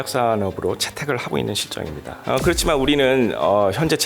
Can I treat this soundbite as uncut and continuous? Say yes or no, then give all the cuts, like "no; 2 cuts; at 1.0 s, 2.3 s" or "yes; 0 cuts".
no; 1 cut; at 2.1 s